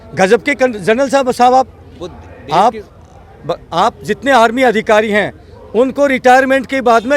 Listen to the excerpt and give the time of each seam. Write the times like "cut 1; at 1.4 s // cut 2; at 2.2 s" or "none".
none